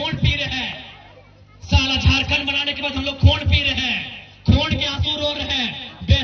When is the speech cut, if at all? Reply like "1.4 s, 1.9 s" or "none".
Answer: none